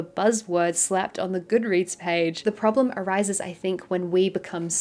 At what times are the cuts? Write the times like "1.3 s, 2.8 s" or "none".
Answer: 2.4 s